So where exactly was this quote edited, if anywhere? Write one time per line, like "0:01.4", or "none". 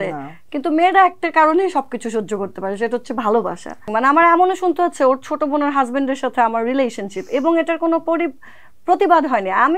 0:03.9